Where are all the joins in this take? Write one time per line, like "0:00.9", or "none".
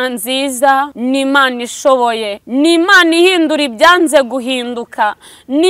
0:00.9
0:02.3